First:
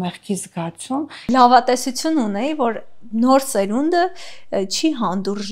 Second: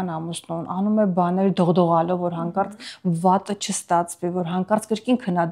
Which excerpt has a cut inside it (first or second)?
first